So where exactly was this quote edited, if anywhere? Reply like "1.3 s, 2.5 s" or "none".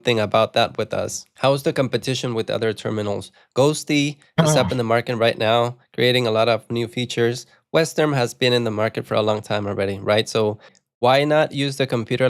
1.2 s, 10.7 s